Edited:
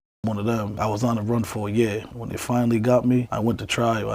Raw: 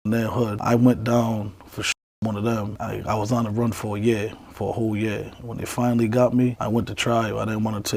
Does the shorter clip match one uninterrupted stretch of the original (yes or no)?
no